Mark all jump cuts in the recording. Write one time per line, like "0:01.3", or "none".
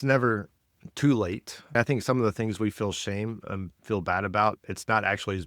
0:01.8